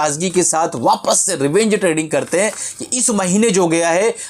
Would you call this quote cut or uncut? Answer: uncut